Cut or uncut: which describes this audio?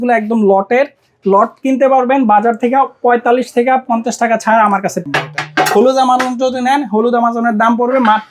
cut